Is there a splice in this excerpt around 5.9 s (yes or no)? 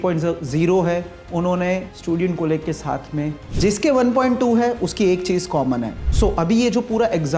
yes